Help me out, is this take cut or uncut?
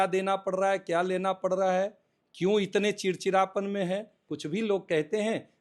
cut